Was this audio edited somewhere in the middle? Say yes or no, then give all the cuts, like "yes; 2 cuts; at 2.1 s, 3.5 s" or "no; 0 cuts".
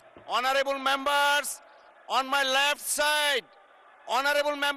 no; 0 cuts